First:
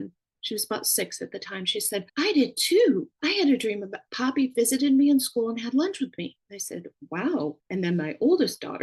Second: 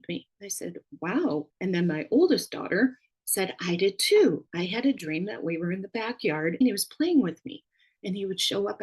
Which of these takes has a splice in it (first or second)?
second